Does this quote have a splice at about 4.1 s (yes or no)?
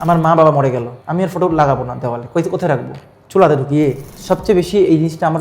yes